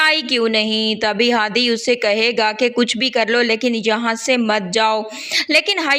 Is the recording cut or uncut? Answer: cut